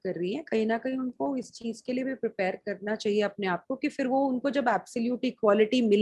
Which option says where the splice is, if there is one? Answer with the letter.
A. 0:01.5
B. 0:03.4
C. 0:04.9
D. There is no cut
D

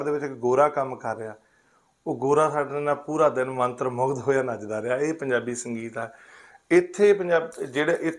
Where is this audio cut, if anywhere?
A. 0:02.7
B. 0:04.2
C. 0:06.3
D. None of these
D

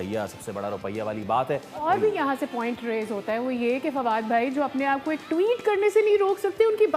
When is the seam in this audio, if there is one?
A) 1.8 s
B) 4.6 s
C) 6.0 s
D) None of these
A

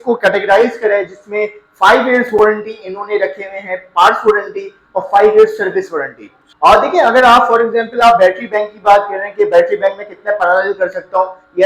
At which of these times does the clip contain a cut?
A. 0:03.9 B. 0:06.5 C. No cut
B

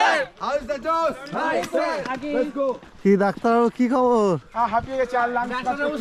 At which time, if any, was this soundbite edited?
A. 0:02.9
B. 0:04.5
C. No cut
A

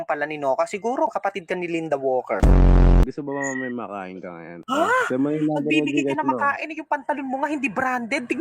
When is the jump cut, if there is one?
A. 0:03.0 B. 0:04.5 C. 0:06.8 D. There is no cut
A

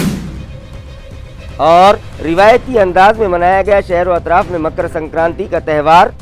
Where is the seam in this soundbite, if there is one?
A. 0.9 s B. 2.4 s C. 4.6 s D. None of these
A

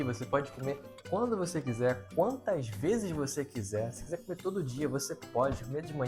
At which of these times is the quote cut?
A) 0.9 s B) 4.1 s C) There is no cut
A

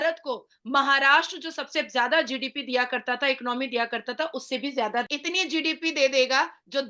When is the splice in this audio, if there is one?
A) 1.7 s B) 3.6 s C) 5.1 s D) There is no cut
C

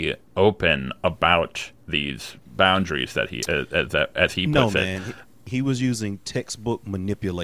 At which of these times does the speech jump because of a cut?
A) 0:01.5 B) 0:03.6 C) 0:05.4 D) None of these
C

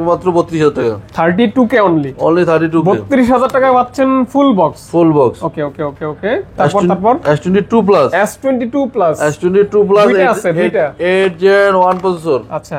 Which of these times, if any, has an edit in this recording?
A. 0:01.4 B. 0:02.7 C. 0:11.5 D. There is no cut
D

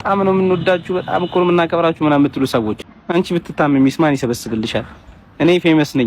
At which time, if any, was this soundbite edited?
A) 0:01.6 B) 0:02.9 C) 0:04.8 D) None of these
B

